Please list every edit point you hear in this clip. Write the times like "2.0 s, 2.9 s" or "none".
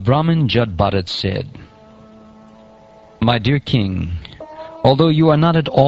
3.9 s